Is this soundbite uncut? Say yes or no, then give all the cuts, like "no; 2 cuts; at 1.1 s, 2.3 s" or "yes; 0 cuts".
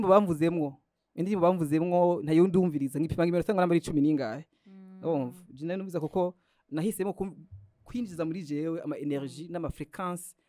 yes; 0 cuts